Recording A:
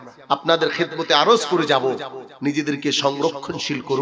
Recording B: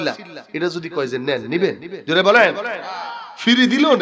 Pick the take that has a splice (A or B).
B